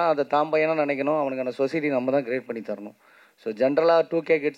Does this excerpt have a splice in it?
no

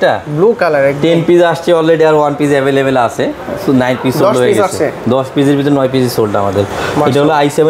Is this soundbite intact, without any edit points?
yes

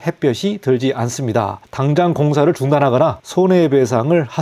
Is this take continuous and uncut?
no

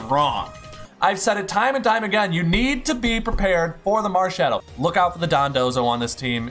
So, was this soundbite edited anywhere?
yes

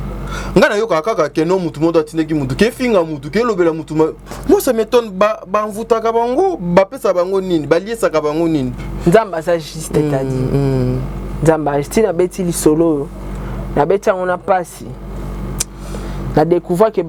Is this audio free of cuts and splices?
yes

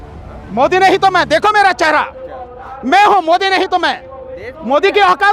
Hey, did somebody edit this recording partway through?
no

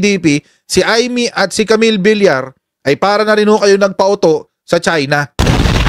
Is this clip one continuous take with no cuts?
yes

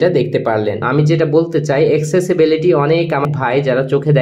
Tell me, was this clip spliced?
yes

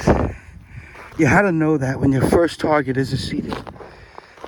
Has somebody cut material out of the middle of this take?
no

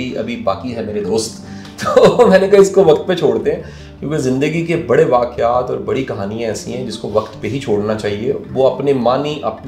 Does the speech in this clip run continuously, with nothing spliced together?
yes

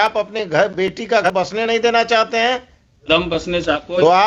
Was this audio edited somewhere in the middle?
yes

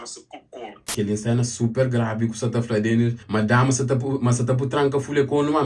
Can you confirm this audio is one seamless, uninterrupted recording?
no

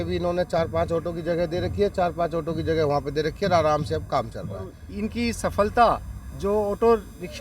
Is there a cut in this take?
yes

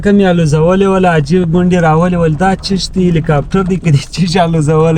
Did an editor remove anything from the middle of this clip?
no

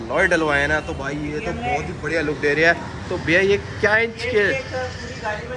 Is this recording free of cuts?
yes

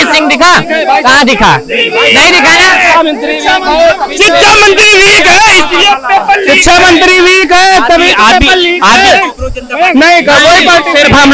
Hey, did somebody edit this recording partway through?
no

